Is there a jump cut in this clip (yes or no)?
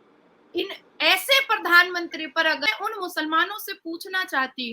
yes